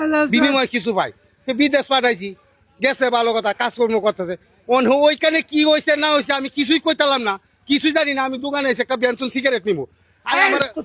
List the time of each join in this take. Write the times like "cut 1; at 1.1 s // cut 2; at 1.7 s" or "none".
none